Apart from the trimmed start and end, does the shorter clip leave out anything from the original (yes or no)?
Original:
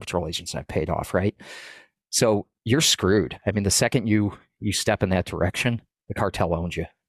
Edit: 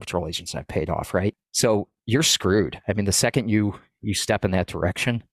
yes